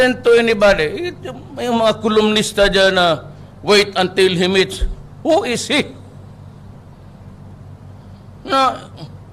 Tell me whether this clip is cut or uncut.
uncut